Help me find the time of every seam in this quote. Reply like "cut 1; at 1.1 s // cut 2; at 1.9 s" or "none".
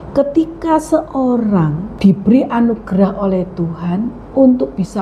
cut 1; at 1.9 s